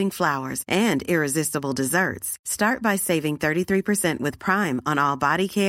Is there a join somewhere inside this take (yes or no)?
no